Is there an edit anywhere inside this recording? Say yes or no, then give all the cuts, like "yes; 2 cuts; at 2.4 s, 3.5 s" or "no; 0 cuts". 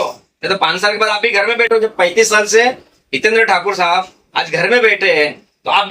no; 0 cuts